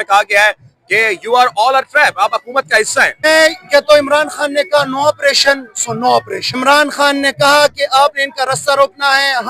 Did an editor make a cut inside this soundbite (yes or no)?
yes